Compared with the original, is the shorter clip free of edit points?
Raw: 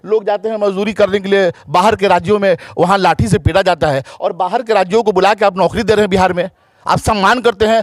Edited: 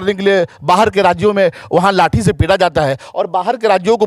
yes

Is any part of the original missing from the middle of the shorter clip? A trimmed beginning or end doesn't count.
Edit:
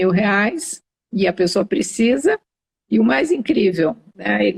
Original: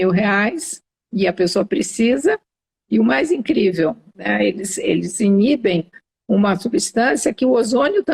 no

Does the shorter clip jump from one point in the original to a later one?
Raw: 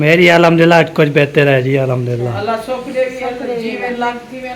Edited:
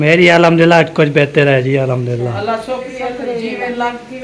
yes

